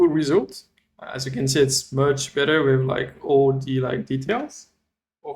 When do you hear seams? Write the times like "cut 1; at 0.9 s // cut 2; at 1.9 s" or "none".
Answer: none